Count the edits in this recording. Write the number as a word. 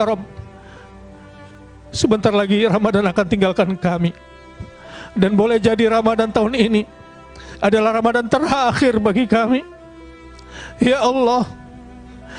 one